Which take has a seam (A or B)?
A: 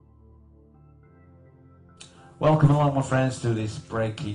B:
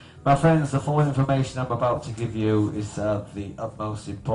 B